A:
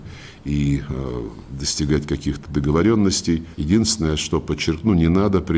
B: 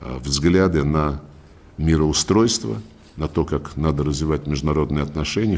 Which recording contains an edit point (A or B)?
A